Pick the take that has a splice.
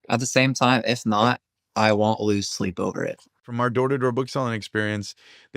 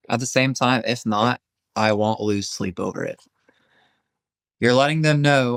first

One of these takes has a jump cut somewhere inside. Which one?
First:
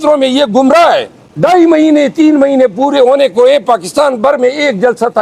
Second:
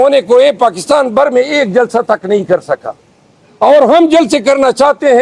first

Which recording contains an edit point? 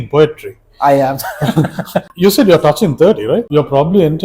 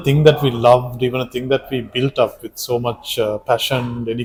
first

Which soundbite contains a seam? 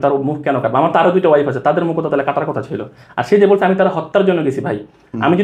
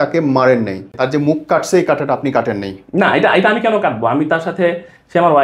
second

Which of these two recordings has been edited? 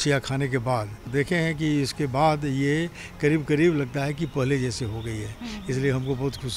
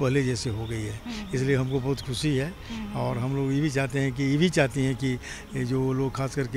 first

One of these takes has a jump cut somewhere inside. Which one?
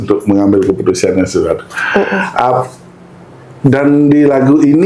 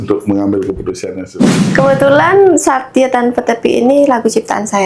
second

